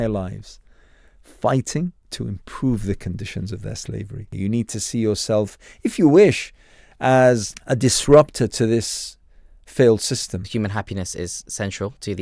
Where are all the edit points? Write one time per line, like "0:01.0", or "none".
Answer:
0:02.1
0:04.3
0:07.5
0:10.5